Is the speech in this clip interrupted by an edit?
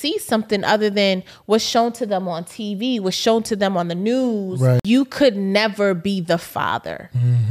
yes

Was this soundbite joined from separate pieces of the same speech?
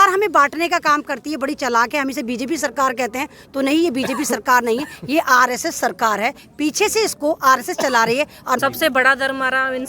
yes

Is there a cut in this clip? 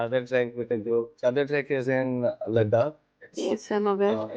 no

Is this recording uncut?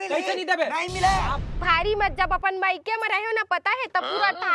no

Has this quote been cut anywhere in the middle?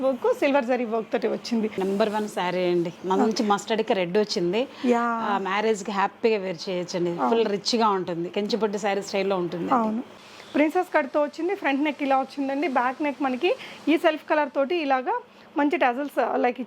yes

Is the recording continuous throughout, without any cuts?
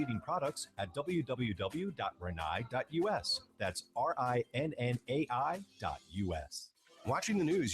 no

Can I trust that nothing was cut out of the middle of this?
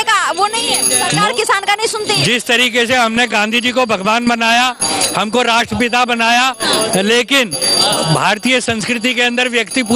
yes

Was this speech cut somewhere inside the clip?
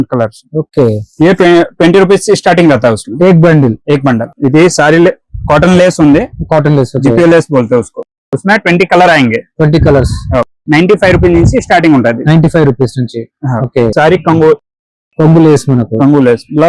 yes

